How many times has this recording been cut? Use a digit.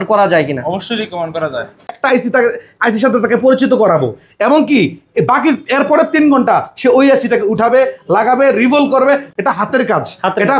2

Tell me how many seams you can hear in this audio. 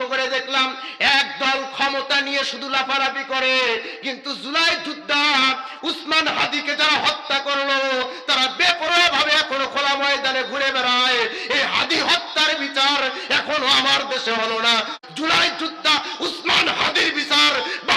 1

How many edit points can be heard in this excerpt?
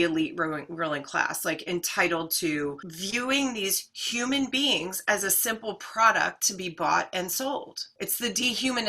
1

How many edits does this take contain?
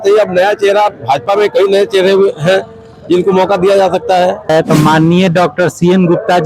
1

